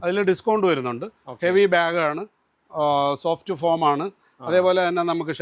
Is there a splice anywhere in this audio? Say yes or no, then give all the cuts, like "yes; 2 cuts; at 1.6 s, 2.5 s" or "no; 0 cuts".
no; 0 cuts